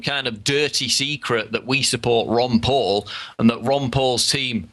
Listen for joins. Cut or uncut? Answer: cut